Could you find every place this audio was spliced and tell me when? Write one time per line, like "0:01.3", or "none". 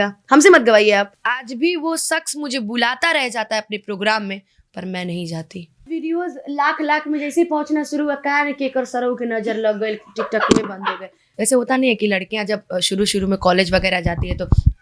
0:01.2
0:05.9
0:11.3